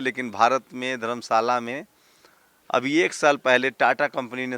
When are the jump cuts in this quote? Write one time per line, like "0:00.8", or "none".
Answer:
none